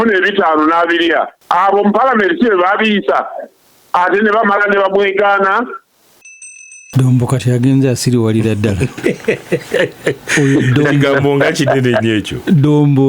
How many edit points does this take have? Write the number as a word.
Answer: two